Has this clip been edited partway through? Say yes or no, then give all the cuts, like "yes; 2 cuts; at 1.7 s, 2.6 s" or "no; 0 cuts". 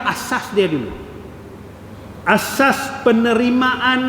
no; 0 cuts